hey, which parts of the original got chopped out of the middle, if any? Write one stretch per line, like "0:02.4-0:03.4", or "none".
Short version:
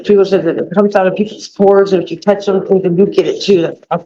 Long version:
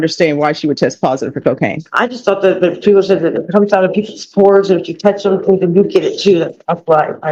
none